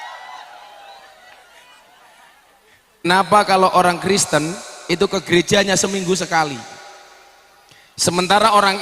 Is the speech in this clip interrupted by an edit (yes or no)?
yes